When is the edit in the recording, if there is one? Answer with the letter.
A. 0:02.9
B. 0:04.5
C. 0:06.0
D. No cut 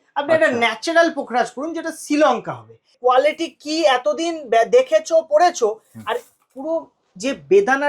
A